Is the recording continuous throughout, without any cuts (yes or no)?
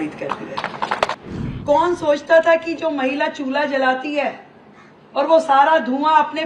no